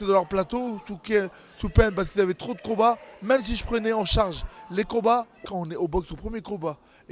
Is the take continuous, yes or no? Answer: no